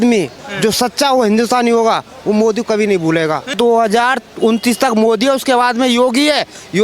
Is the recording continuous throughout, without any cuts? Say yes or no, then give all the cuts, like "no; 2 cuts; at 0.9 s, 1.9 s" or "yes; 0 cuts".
no; 1 cut; at 3.4 s